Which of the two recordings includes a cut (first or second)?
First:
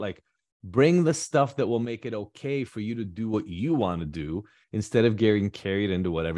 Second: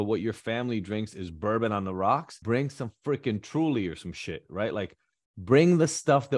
second